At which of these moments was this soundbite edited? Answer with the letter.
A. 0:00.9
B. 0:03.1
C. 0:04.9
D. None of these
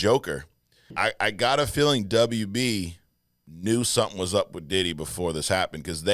A